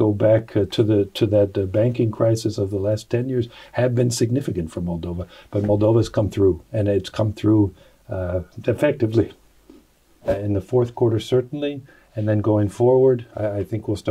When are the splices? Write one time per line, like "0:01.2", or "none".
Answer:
0:10.3